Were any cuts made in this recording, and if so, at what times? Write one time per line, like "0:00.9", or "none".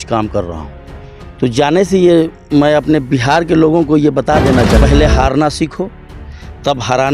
0:04.8